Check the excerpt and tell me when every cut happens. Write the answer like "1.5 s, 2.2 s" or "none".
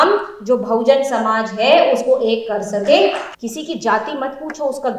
3.3 s